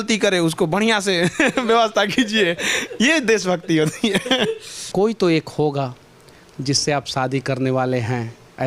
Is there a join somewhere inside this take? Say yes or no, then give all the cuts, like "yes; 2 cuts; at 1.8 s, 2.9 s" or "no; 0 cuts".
yes; 1 cut; at 4.7 s